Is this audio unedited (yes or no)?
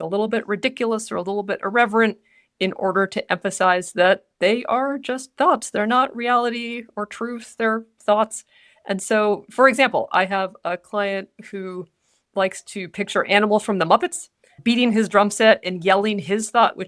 yes